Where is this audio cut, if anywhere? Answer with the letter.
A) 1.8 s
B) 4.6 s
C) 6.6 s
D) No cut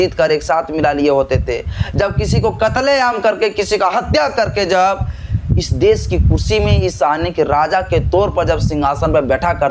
D